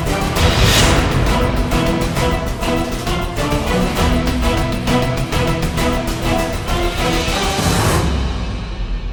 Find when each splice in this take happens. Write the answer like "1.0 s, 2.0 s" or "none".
none